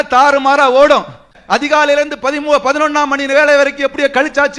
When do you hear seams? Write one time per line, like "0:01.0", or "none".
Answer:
0:01.3